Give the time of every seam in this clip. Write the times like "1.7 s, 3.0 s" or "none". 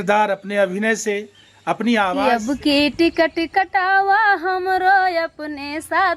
2.3 s